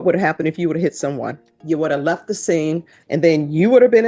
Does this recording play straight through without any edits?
no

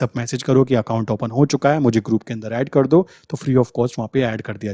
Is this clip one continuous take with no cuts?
yes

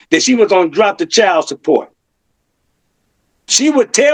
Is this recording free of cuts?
yes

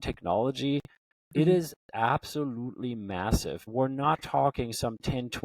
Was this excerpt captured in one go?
no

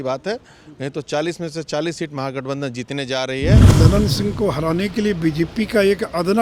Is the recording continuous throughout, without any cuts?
no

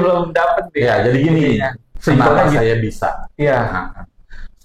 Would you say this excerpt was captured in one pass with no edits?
no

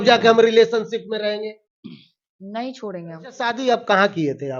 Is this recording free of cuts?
no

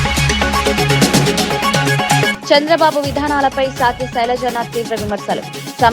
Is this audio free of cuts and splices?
no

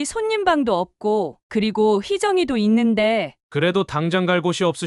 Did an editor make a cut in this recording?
yes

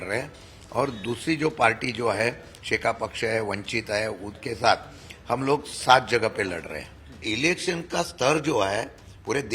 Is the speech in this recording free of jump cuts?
no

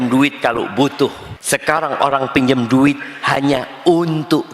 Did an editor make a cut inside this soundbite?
yes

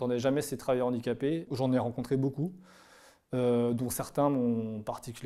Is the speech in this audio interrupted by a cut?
no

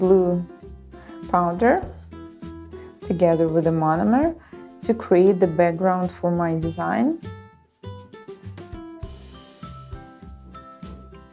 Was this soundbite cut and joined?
yes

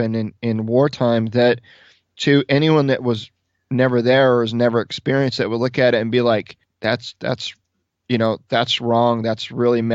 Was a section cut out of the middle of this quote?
yes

